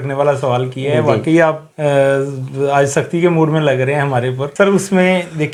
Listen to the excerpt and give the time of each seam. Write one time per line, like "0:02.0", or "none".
none

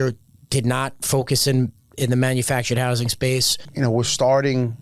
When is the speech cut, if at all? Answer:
0:03.6

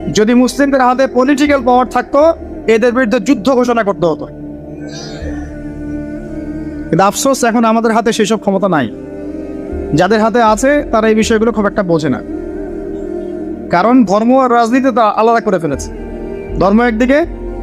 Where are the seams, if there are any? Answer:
0:12.2
0:13.7

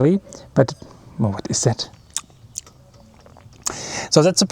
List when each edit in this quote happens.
0:01.9

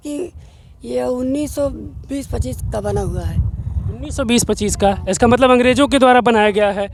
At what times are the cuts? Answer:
none

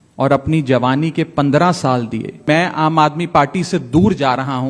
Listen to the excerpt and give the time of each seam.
0:02.4

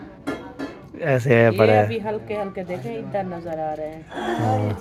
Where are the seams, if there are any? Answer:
none

